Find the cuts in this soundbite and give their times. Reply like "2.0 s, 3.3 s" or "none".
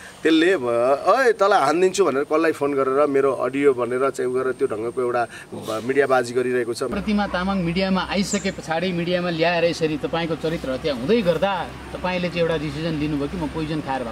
6.9 s